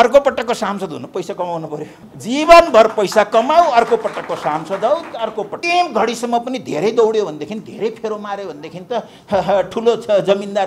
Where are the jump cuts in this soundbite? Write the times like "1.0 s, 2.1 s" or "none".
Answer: 2.0 s, 5.6 s

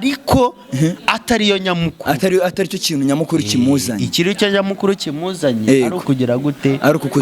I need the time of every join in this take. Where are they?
none

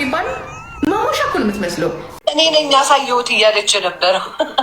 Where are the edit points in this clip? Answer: 2.1 s

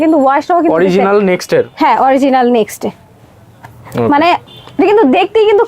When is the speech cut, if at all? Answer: none

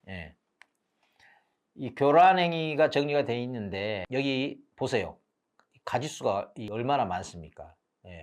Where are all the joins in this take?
4.0 s, 6.6 s

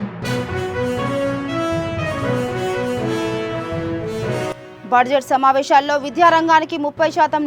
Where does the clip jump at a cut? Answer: 4.6 s

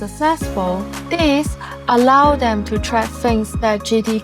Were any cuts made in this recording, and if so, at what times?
0.9 s

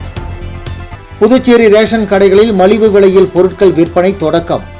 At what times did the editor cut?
1.1 s

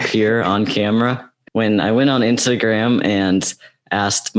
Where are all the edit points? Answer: 1.3 s

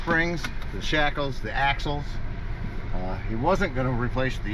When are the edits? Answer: none

